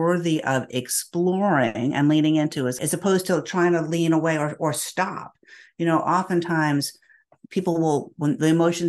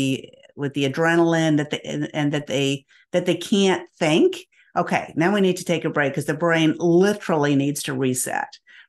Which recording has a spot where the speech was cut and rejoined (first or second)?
first